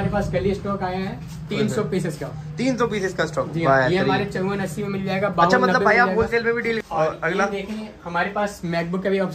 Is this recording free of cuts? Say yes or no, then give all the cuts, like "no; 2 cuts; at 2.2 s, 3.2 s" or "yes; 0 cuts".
no; 1 cut; at 6.8 s